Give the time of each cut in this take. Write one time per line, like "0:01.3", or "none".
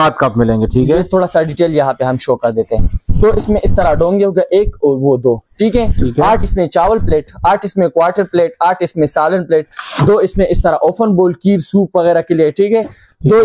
none